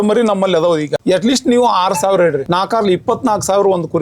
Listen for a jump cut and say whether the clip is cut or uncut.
cut